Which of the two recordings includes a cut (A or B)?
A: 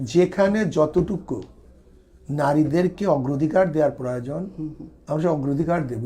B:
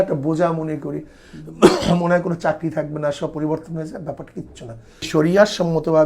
B